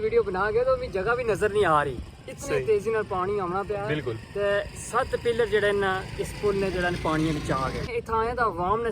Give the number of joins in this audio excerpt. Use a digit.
1